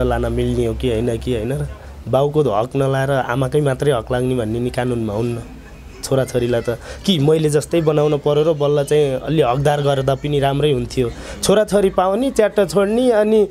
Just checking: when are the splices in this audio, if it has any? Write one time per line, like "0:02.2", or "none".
none